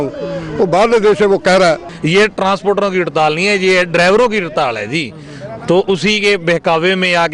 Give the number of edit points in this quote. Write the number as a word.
one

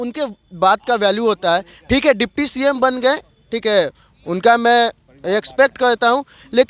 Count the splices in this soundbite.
zero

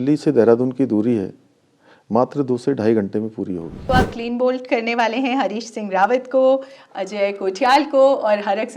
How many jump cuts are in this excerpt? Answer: one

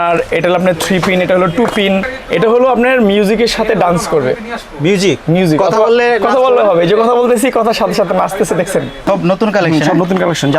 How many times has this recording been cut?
two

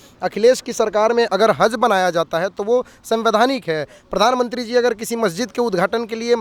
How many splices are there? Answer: zero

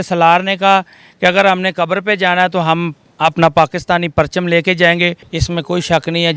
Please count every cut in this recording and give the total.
one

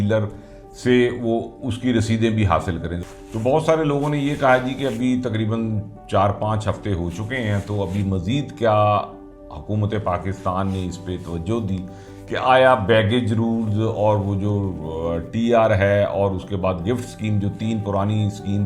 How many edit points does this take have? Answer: one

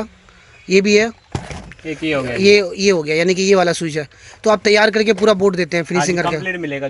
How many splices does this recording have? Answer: zero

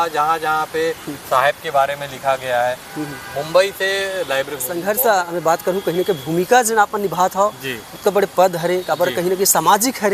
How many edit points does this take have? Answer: one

